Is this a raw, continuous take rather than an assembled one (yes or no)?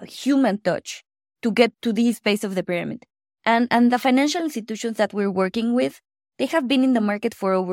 no